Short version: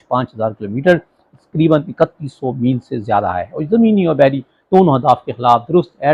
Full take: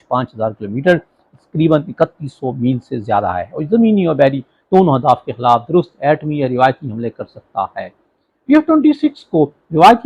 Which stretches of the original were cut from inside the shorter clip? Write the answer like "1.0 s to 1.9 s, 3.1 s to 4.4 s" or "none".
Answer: none

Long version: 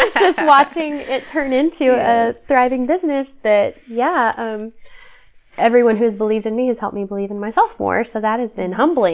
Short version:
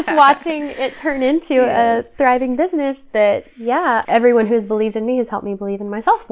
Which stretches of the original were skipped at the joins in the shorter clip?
4.3 s to 5.5 s

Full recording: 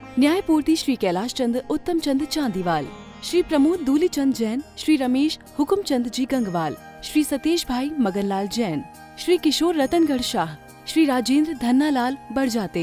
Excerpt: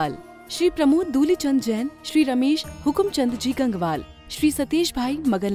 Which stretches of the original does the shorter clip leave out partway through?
none

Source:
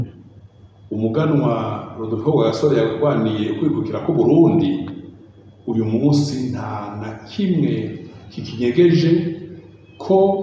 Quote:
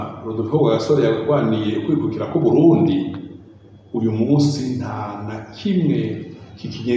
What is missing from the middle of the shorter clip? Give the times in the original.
none

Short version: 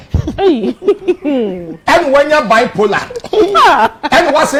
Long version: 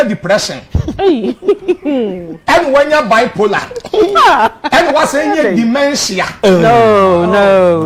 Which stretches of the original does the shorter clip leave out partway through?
none

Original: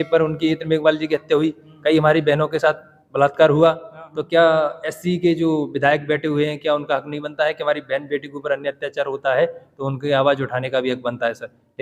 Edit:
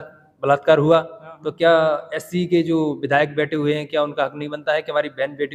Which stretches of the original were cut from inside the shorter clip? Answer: none

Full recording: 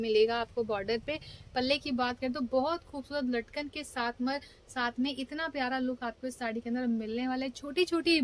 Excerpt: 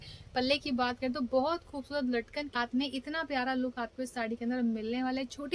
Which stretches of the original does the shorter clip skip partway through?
3.7 s to 4.8 s

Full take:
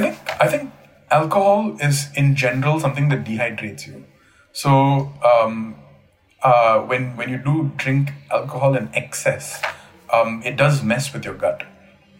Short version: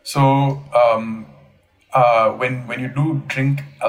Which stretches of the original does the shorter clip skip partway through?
none

